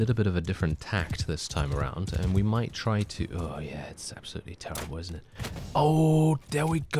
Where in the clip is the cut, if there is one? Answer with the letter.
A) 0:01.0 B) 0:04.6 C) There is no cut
C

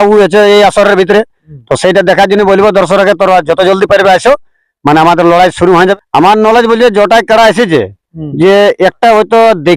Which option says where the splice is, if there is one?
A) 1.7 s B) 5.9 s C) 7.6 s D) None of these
B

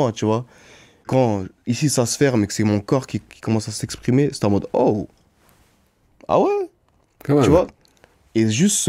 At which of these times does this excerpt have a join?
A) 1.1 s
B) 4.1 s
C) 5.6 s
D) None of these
A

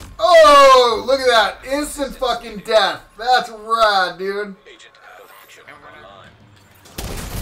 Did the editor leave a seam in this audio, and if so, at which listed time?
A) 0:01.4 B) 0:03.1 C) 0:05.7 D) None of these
C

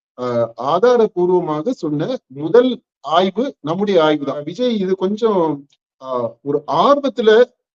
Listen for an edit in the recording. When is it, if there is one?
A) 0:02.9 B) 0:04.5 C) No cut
B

